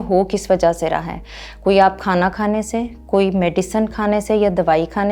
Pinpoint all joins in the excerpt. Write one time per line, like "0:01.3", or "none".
none